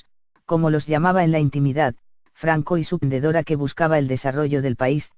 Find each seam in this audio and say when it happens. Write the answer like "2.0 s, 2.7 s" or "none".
none